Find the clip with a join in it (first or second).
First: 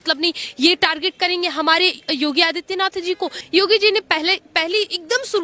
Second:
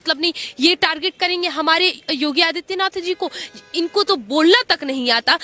first